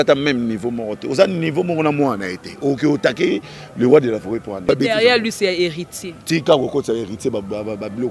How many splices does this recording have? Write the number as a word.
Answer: one